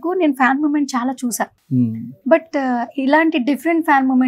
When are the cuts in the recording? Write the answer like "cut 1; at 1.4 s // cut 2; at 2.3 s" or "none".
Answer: none